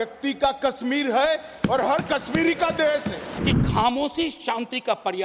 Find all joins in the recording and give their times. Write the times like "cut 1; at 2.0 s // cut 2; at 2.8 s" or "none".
cut 1; at 3.3 s

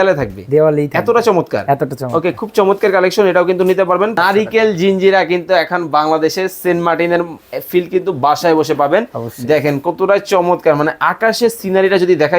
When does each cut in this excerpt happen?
cut 1; at 4.2 s

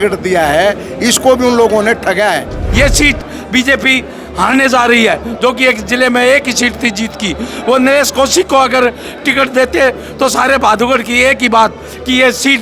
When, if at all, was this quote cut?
cut 1; at 2.6 s

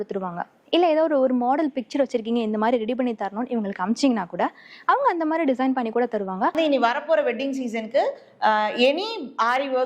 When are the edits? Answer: cut 1; at 6.5 s

